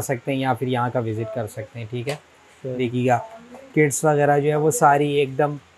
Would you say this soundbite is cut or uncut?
uncut